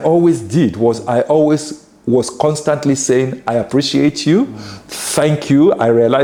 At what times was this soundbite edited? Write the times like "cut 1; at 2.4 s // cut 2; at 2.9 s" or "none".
none